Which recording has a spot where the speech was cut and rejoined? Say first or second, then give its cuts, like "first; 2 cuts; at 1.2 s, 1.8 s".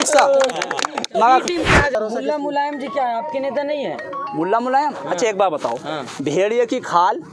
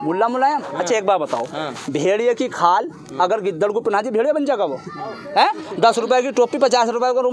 first; 1 cut; at 1.9 s